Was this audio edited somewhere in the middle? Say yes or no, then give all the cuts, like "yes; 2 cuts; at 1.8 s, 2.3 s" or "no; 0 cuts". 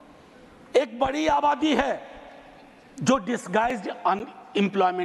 no; 0 cuts